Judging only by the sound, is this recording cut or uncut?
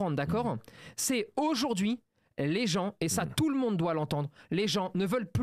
uncut